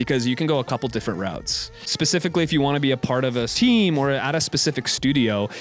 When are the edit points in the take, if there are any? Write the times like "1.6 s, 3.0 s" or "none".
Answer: 1.9 s, 3.5 s